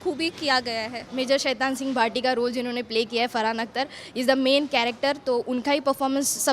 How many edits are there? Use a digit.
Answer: 1